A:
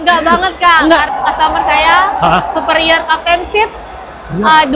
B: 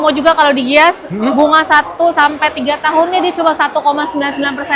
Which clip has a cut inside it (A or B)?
A